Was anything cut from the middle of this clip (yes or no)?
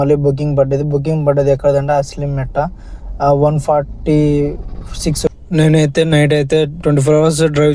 yes